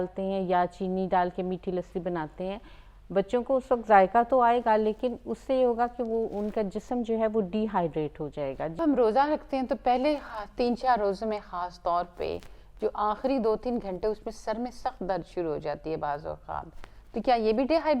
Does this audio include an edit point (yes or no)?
yes